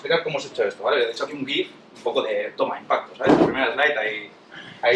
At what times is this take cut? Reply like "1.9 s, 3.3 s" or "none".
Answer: 1.9 s